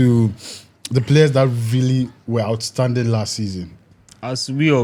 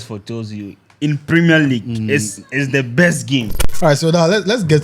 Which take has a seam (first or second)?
second